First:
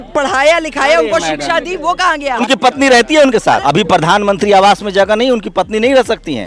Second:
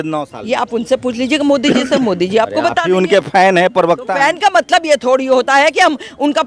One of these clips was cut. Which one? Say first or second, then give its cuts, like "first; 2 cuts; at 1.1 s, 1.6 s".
first; 2 cuts; at 2.4 s, 3.6 s